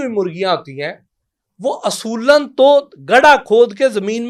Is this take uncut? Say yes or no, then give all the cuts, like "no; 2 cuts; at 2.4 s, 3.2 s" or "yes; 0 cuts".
yes; 0 cuts